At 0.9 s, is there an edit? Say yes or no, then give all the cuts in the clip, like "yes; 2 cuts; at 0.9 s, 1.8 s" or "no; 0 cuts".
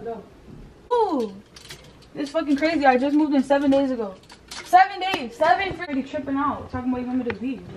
yes; 2 cuts; at 0.9 s, 5.9 s